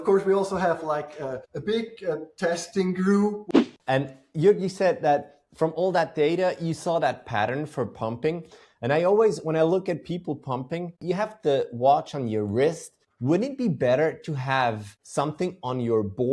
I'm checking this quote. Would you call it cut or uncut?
cut